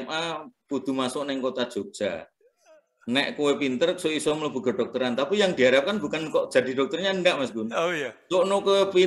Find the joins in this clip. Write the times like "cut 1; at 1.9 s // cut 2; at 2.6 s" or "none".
none